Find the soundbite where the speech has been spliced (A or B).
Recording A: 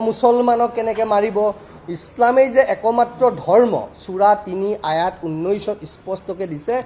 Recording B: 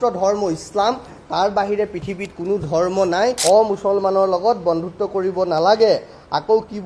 B